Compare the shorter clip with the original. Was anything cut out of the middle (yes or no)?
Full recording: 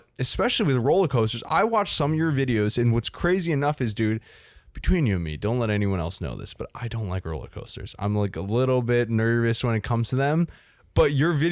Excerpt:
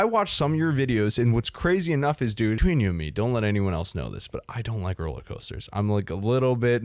yes